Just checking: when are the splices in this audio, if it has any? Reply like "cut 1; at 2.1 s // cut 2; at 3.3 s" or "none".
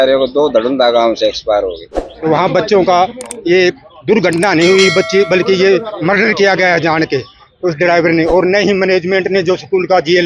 cut 1; at 2.2 s